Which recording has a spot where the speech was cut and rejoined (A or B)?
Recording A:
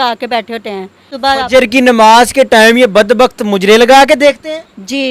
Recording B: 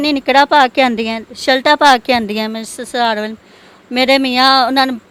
A